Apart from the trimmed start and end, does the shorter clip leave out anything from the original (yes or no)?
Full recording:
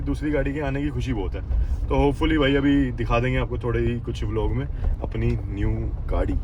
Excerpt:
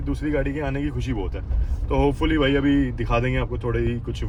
no